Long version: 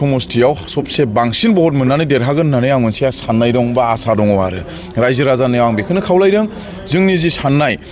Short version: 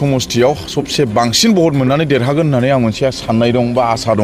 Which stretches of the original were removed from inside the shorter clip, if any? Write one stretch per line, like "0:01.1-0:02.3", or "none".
none